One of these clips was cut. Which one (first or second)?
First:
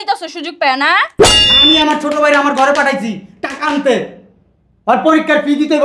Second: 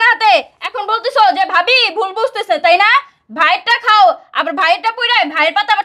first